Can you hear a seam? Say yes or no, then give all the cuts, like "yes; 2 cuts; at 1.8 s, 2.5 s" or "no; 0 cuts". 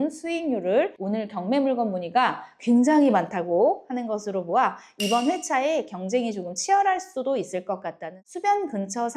yes; 2 cuts; at 0.9 s, 8.1 s